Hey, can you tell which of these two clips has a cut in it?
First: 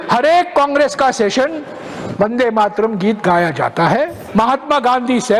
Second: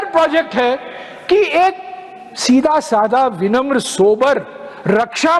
first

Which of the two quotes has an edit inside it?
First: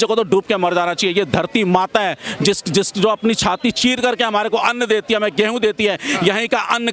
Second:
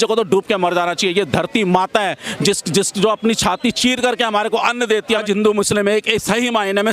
second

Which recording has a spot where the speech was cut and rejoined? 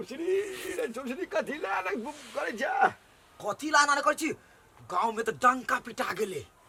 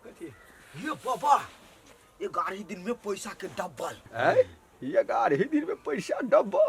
second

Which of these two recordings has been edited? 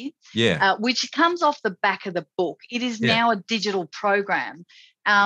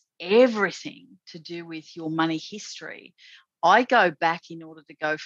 second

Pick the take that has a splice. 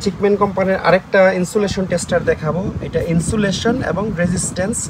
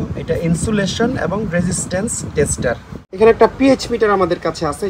second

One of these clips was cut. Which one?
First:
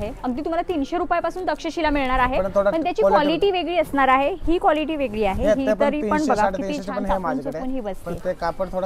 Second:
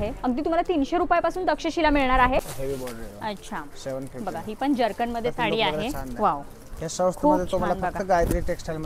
second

